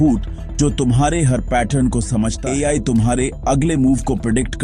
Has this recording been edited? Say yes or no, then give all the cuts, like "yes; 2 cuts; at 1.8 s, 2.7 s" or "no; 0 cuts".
yes; 1 cut; at 2.4 s